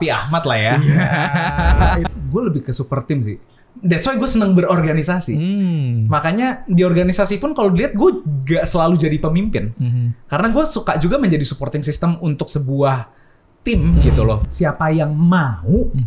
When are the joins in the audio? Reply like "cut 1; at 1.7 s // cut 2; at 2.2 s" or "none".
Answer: cut 1; at 2.1 s // cut 2; at 14.4 s